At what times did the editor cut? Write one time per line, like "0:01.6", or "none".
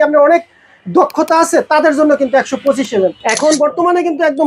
0:03.2